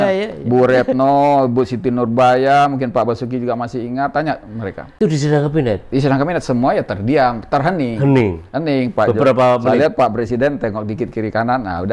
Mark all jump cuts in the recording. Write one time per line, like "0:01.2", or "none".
0:05.0